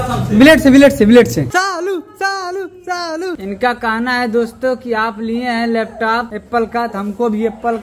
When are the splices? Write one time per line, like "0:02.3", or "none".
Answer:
0:01.5
0:03.4